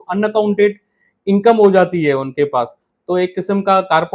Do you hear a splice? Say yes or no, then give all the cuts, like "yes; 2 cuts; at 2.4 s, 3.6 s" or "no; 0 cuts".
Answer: no; 0 cuts